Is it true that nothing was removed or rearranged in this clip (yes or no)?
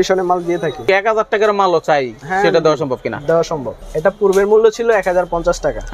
no